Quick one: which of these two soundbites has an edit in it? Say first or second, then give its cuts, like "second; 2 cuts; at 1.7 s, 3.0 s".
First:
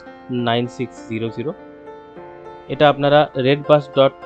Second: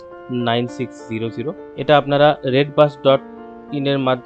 second; 1 cut; at 1.6 s